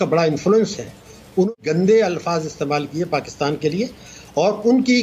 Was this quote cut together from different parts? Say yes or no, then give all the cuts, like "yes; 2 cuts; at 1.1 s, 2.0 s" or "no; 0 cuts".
yes; 1 cut; at 1.5 s